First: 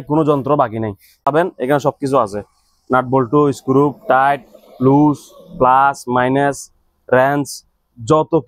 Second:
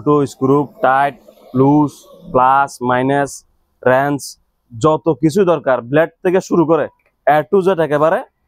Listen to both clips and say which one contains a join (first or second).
first